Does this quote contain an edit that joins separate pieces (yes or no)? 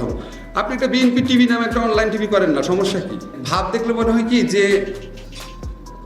yes